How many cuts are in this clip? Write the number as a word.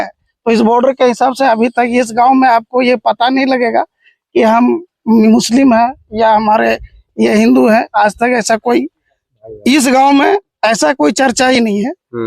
zero